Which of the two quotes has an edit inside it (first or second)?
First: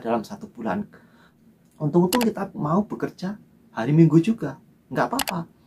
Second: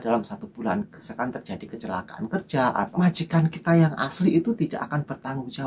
second